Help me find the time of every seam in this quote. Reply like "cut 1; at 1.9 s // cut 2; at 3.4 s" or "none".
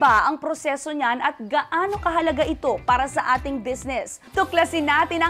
cut 1; at 4.3 s